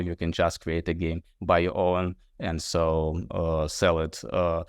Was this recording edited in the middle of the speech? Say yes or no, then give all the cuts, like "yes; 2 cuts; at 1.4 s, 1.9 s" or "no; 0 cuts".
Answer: no; 0 cuts